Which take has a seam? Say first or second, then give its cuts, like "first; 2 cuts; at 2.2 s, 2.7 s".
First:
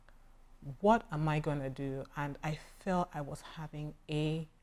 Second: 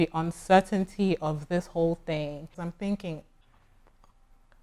second; 1 cut; at 2.6 s